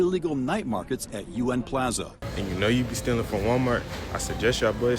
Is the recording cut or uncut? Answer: cut